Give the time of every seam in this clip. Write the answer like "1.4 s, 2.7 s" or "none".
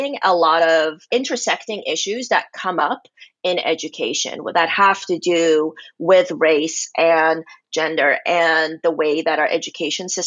1.1 s